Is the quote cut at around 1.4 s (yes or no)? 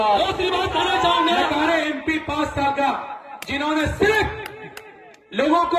yes